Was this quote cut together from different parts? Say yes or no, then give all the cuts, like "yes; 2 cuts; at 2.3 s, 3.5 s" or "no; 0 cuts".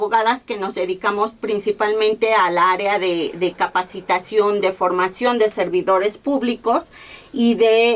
no; 0 cuts